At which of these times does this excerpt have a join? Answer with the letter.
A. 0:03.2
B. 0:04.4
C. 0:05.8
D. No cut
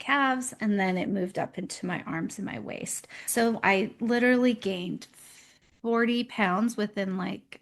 A